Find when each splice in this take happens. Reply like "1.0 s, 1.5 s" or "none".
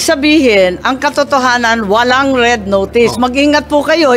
none

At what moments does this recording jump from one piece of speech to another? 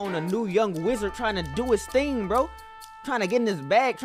none

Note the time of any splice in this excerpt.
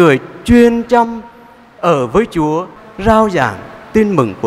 2.8 s

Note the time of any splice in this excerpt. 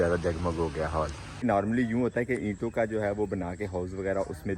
1.4 s

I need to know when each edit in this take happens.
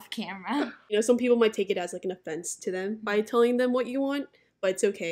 0.9 s

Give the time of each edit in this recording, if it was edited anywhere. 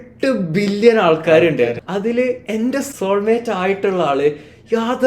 1.8 s, 2.9 s

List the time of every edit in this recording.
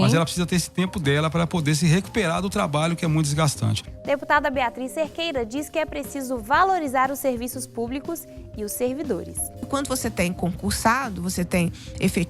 3.9 s, 9.6 s

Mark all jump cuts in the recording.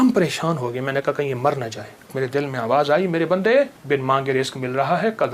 2.1 s, 3.8 s

